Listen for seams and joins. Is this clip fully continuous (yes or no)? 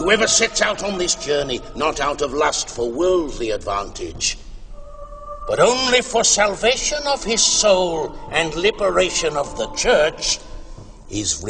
no